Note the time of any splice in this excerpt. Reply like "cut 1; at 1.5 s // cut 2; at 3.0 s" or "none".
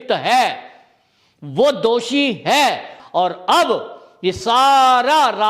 cut 1; at 2.9 s